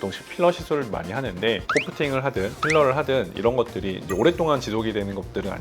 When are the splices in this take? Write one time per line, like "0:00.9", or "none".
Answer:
0:01.6